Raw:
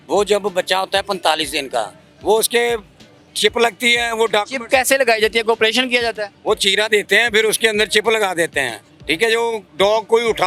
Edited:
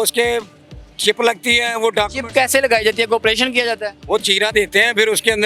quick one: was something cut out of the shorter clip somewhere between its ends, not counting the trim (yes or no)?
no